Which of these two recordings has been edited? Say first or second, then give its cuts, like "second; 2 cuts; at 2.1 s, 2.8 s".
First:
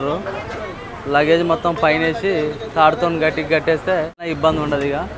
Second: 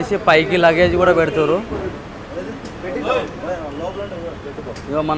first; 1 cut; at 4.2 s